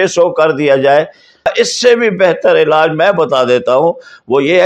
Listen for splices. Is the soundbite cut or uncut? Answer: cut